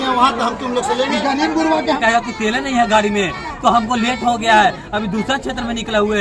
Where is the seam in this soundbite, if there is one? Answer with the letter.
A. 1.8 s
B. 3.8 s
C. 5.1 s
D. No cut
A